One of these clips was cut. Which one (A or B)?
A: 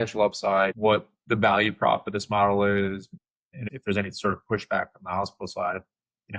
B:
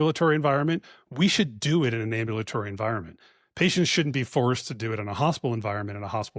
A